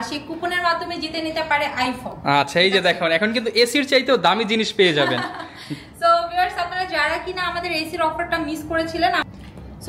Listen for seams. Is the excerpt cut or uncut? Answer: uncut